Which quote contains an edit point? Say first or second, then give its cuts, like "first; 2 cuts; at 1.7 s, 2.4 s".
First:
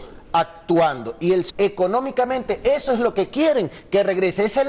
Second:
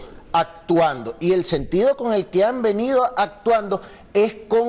second; 1 cut; at 1.5 s